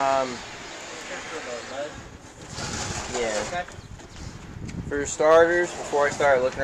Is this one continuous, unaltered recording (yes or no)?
yes